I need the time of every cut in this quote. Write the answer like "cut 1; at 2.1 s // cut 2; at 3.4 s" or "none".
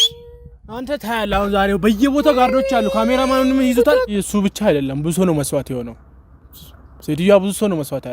cut 1; at 4.1 s